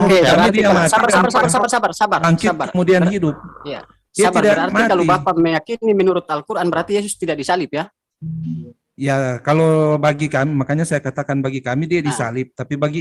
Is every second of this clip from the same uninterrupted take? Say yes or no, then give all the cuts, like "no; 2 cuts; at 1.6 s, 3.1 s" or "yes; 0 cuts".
yes; 0 cuts